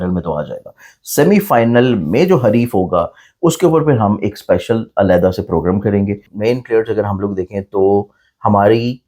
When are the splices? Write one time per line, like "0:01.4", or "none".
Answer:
0:06.2